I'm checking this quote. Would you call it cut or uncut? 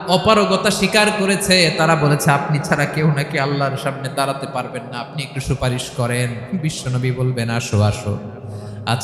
uncut